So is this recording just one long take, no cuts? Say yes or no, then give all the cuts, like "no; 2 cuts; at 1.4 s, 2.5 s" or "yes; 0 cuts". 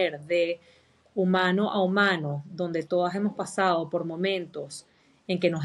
yes; 0 cuts